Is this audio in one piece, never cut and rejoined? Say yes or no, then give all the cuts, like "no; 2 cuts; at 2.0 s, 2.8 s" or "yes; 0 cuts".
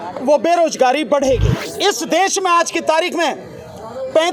no; 1 cut; at 1.6 s